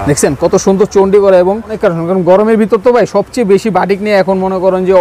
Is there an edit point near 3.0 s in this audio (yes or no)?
no